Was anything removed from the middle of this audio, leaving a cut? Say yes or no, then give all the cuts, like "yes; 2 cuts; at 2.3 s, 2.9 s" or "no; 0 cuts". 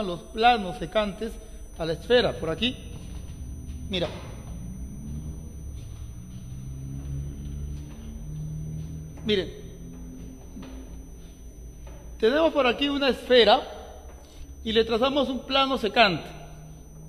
no; 0 cuts